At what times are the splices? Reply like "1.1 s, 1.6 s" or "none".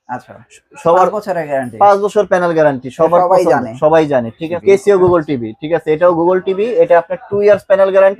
4.5 s